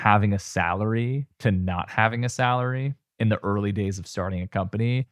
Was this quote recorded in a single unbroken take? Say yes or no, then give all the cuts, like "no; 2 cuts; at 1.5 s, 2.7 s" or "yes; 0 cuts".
yes; 0 cuts